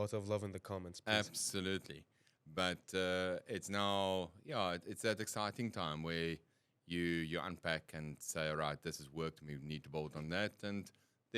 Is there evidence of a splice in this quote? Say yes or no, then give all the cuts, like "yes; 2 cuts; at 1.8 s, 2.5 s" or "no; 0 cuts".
no; 0 cuts